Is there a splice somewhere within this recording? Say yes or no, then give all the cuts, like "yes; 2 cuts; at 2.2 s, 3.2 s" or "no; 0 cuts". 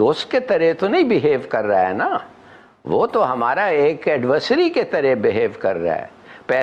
no; 0 cuts